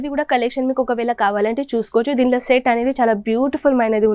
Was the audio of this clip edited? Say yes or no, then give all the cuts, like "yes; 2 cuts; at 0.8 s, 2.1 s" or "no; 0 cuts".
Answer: no; 0 cuts